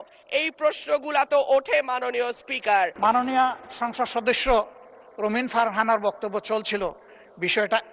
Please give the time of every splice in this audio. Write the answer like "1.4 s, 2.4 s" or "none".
2.9 s

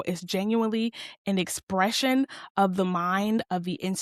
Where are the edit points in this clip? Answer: none

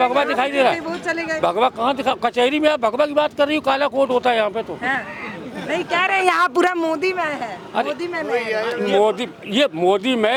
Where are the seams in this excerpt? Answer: none

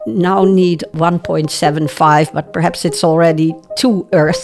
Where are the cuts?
0.9 s

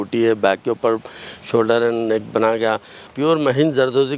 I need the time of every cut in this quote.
3.0 s

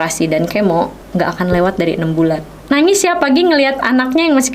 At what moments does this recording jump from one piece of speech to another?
1.0 s, 2.5 s

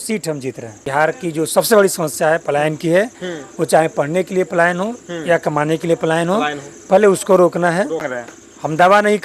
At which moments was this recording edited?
0.8 s, 8.2 s

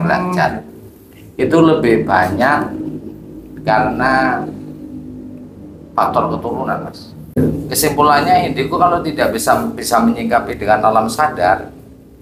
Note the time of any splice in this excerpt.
7.4 s

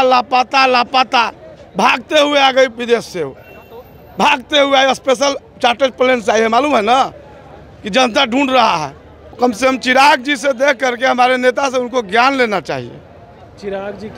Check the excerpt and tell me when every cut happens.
9.3 s

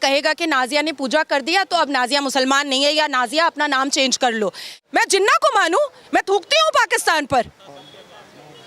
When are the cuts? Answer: 4.8 s

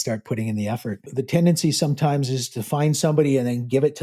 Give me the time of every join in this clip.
1.0 s

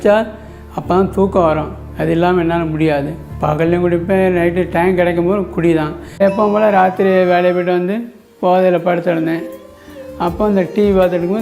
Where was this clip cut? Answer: 6.0 s

